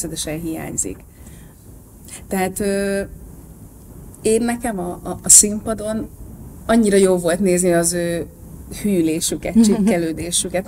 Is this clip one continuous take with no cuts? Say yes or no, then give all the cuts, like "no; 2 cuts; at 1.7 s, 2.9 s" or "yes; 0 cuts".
yes; 0 cuts